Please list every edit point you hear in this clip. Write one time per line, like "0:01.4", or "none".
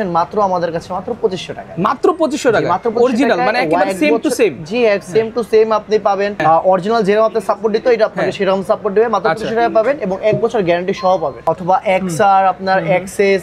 0:06.4
0:11.4